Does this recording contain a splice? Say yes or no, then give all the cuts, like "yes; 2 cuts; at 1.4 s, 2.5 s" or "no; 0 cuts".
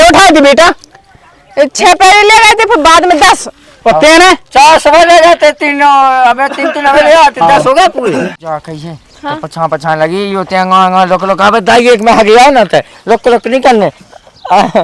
yes; 1 cut; at 8.3 s